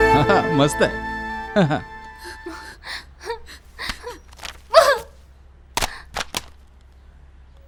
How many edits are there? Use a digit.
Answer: 0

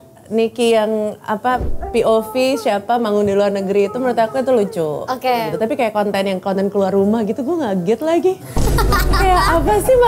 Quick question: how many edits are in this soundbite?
1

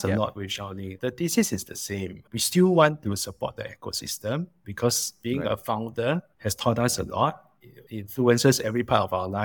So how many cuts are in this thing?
1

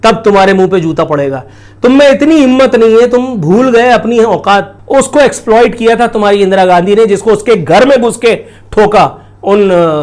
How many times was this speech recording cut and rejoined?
1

